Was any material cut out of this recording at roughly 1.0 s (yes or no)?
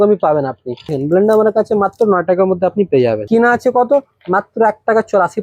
yes